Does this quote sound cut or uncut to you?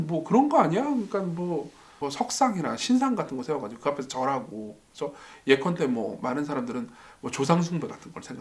cut